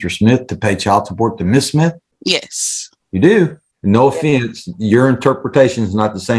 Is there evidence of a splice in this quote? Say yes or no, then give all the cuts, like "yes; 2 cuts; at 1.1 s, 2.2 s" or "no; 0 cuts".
yes; 2 cuts; at 2.1 s, 3.7 s